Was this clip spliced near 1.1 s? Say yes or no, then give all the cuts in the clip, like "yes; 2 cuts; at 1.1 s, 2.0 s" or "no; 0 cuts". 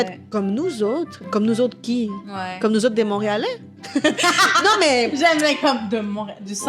yes; 1 cut; at 1.1 s